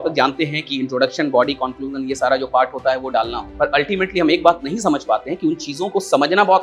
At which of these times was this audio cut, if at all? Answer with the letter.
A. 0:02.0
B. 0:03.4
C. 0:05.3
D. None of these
B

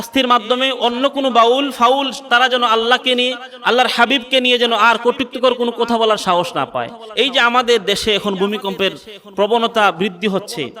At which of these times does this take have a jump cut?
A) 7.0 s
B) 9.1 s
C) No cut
A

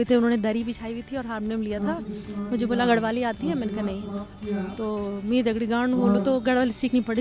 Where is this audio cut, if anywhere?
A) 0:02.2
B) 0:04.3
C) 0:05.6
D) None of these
D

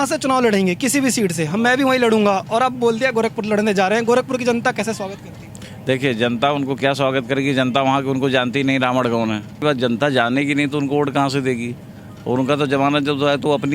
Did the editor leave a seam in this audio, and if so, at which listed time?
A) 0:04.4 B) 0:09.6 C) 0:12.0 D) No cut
B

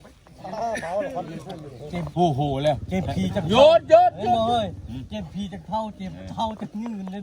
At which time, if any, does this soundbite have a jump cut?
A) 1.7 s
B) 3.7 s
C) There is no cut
A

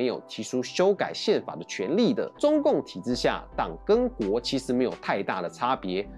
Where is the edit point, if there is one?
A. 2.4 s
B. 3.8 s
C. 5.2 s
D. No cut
A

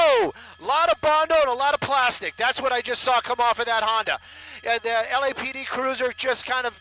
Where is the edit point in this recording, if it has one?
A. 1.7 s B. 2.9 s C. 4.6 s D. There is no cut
A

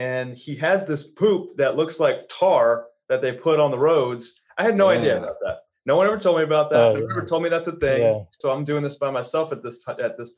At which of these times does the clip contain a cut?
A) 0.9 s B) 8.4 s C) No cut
B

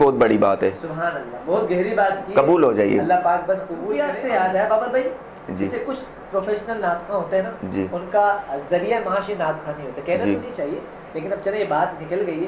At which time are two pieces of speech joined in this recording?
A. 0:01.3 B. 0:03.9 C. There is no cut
B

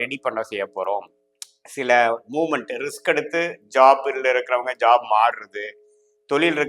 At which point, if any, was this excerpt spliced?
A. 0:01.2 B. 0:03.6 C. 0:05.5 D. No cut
A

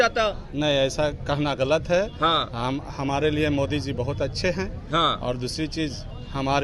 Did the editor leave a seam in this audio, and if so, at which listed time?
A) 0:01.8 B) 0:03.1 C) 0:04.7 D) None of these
D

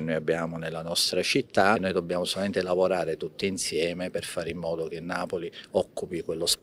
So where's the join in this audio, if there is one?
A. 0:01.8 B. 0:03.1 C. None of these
A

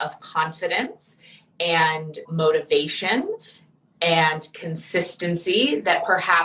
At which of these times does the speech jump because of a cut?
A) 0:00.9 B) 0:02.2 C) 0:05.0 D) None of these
B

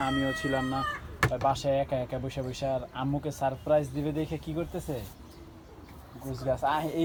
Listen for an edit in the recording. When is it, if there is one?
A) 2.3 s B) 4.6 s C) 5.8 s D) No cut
D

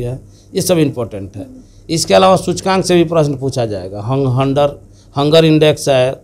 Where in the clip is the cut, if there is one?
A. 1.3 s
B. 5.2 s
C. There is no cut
C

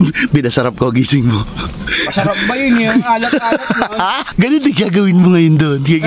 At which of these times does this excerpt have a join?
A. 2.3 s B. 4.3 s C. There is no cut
B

